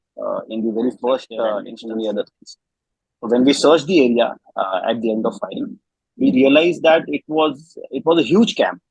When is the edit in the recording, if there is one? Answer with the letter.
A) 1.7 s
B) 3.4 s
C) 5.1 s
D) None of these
A